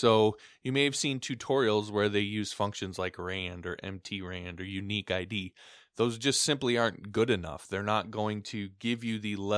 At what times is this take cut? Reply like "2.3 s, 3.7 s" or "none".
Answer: none